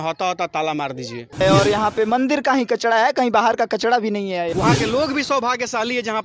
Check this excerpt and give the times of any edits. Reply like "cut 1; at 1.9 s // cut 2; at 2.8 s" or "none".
cut 1; at 1.4 s // cut 2; at 4.5 s